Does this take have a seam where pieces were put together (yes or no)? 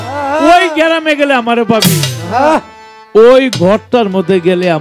no